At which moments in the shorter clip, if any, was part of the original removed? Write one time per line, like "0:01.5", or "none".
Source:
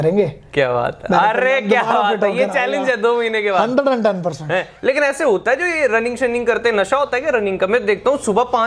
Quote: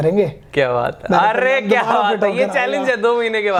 none